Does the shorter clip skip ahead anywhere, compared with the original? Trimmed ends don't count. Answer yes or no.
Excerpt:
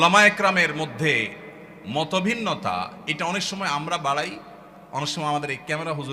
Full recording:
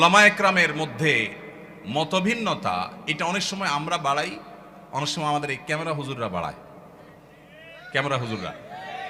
no